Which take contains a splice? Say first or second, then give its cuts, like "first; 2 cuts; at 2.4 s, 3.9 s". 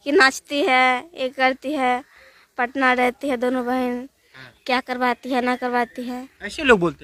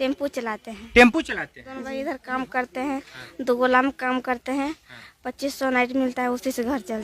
second; 1 cut; at 1.9 s